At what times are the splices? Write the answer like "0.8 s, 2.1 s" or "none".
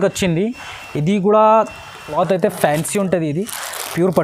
2.1 s